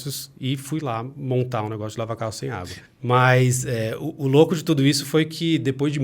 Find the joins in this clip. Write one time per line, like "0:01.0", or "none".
0:02.7